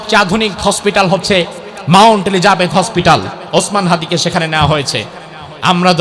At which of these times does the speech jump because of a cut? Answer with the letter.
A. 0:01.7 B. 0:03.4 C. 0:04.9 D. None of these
B